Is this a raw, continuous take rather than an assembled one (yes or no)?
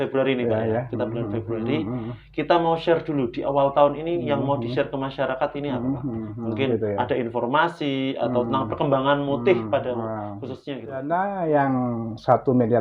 no